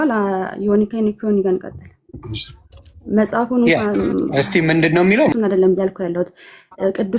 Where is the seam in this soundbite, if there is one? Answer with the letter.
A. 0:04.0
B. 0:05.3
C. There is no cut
B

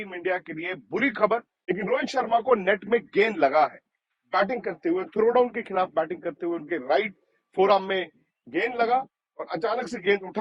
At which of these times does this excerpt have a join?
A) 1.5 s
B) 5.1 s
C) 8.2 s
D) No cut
A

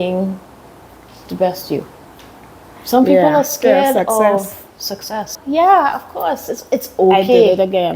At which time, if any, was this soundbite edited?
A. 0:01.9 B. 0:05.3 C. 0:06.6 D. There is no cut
B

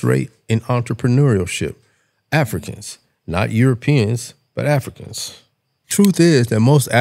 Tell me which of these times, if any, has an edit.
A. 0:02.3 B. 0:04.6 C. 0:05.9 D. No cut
C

